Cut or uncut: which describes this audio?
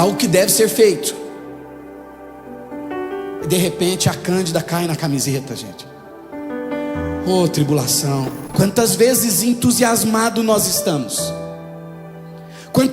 cut